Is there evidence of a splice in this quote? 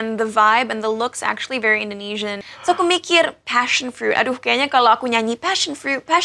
yes; 1 cut; at 2.3 s

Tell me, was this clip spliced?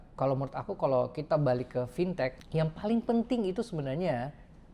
yes; 1 cut; at 2.4 s

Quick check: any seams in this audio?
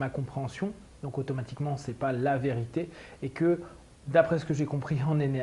no; 0 cuts

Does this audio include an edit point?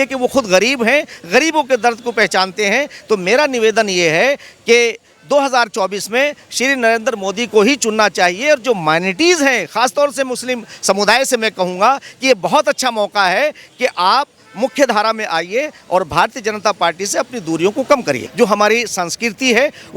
yes; 1 cut; at 18.3 s

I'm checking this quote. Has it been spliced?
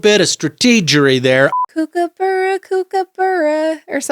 yes; 1 cut; at 1.6 s

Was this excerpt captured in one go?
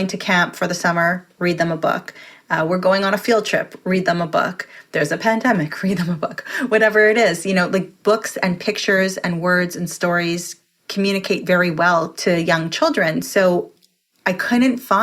no; 2 cuts; at 7.9 s, 12.1 s

